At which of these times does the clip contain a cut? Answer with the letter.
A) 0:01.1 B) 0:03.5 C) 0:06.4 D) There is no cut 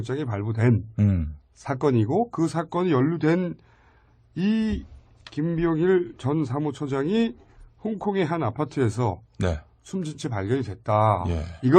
C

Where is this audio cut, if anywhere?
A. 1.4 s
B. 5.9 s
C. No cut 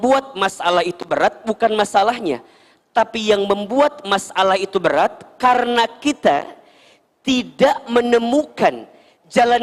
C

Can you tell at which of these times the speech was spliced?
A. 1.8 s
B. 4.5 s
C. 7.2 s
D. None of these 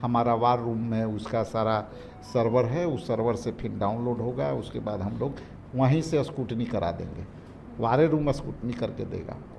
D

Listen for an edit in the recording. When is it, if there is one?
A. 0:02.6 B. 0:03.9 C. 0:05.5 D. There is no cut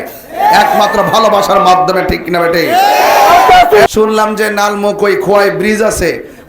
B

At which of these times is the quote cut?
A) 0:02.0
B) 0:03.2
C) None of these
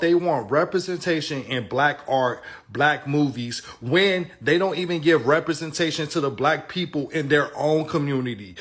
C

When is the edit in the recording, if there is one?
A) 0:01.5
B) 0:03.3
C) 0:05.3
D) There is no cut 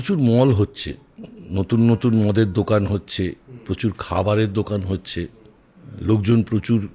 C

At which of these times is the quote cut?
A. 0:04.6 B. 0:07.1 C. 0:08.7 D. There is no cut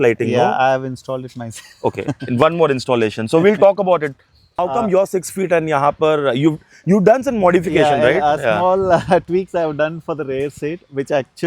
A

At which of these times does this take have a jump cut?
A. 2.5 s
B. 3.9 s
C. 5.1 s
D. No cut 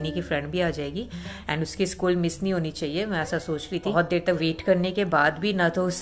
B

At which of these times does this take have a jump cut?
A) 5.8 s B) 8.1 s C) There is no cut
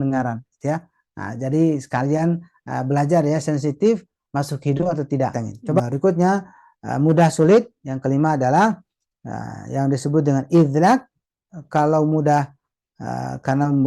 A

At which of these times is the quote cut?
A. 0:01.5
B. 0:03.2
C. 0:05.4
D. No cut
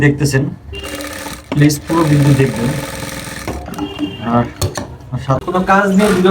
C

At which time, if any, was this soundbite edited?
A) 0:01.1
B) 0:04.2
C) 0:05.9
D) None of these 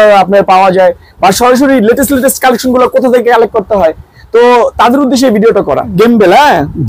C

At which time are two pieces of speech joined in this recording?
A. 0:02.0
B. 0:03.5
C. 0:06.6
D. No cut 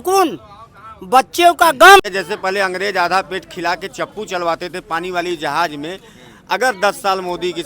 A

